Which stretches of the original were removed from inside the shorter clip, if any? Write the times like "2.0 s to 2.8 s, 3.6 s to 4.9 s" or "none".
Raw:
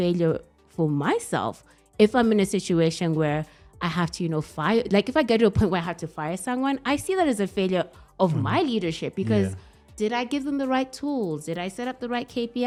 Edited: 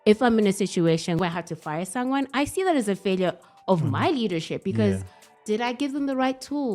3.1 s to 5.7 s